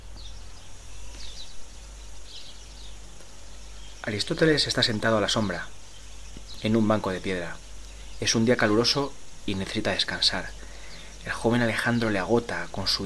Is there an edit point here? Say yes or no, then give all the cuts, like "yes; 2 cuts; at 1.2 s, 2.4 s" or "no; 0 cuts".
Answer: no; 0 cuts